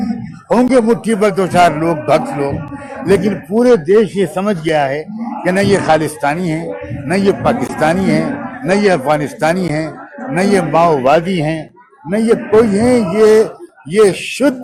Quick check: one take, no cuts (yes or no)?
yes